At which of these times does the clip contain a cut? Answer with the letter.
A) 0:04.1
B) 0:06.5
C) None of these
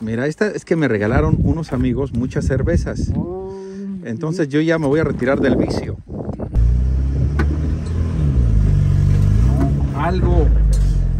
B